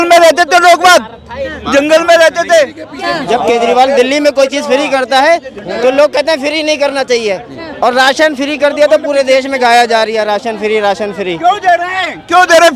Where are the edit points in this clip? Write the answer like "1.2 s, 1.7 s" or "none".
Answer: 2.9 s